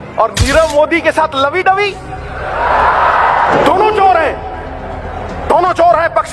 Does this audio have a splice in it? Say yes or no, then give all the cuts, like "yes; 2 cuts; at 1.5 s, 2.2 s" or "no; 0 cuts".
no; 0 cuts